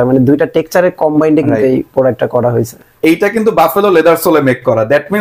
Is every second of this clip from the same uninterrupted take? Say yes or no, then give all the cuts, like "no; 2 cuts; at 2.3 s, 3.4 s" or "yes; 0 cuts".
no; 1 cut; at 2.8 s